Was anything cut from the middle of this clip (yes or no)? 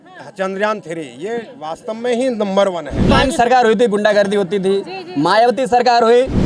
yes